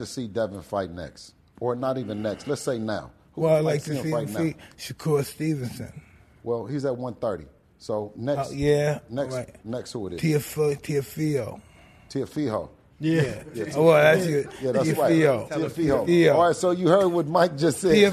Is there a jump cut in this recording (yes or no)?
no